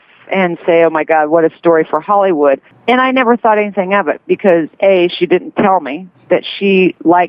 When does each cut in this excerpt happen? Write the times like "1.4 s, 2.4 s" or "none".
2.7 s